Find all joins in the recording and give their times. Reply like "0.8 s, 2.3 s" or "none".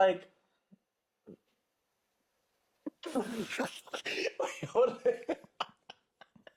none